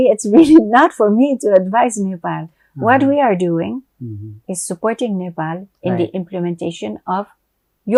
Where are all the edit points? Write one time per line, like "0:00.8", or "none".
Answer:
none